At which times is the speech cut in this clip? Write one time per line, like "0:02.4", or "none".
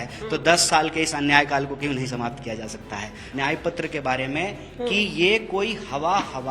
0:03.2